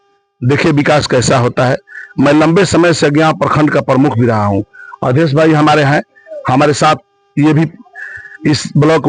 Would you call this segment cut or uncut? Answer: uncut